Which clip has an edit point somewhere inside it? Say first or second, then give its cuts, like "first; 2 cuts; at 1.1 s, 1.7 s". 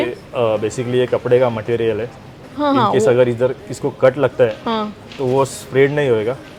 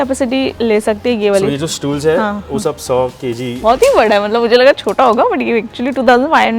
second; 1 cut; at 3.6 s